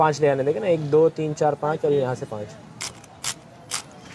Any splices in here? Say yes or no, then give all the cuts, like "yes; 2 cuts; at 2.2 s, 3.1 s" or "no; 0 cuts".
yes; 1 cut; at 2.8 s